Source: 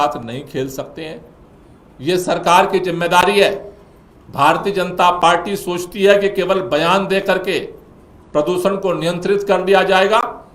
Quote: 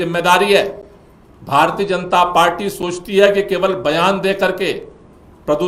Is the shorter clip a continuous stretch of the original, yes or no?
yes